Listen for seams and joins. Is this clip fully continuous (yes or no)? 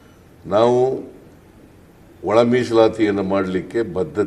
yes